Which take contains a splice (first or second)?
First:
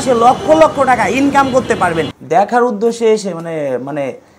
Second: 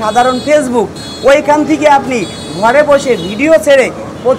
first